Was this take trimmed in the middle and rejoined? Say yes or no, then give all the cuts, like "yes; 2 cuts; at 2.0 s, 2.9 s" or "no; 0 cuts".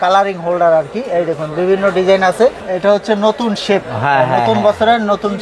yes; 1 cut; at 2.6 s